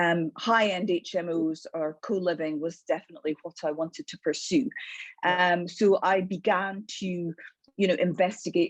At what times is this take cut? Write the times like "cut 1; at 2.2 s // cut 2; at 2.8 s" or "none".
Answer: none